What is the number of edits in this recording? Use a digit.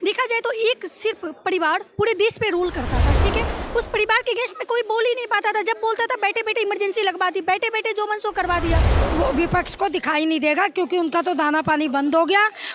1